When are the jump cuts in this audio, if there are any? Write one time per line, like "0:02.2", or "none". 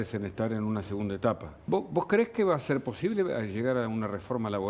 0:01.5